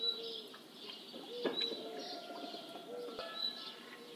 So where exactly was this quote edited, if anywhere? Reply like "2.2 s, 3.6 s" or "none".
3.2 s